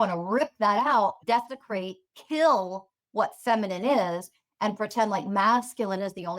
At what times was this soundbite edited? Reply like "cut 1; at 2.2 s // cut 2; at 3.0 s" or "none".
cut 1; at 1.2 s